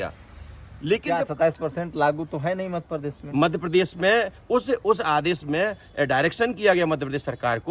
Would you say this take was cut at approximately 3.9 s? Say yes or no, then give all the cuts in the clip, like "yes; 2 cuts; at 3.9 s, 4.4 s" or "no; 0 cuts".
no; 1 cut; at 1.0 s